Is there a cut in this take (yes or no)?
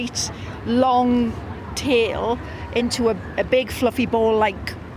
no